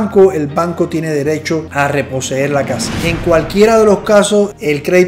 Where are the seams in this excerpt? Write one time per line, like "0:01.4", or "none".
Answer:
0:01.7
0:02.9